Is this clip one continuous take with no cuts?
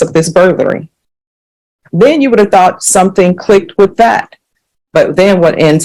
yes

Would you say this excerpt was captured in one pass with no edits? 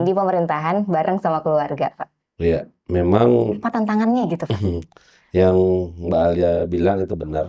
yes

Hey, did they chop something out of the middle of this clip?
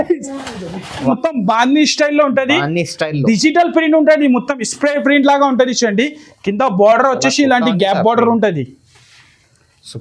yes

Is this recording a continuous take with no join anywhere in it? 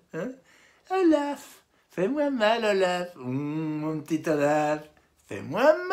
yes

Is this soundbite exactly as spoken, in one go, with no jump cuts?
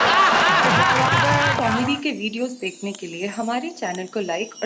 no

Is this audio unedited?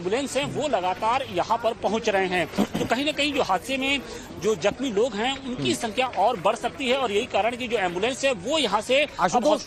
yes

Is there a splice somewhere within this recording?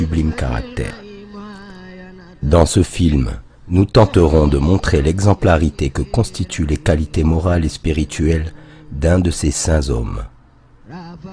yes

